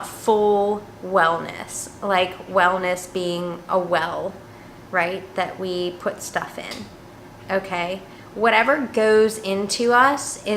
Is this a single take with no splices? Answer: yes; 0 cuts

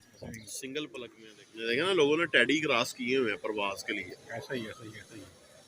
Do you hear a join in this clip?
yes; 1 cut; at 1.2 s

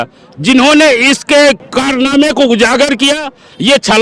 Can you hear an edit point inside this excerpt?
yes; 1 cut; at 1.7 s

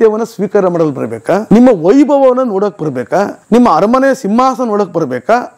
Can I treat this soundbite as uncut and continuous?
no; 2 cuts; at 1.4 s, 3.4 s

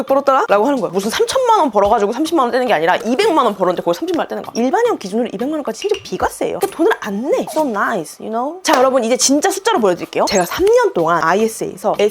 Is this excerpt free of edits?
no; 4 cuts; at 0.9 s, 4.5 s, 8.6 s, 10.3 s

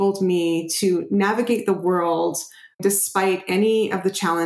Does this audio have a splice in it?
yes; 1 cut; at 2.8 s

